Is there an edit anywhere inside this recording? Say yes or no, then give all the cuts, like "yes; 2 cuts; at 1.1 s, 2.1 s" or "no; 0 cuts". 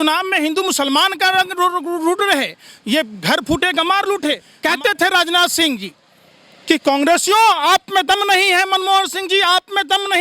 yes; 1 cut; at 4.5 s